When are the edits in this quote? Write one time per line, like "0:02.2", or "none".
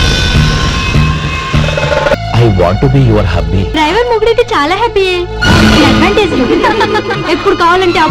0:02.2
0:03.7